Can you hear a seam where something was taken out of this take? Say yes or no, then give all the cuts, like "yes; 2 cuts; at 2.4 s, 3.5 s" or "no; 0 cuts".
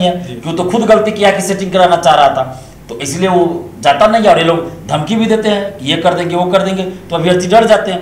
no; 0 cuts